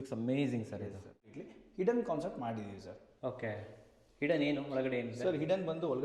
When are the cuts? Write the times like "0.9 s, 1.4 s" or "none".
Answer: 1.1 s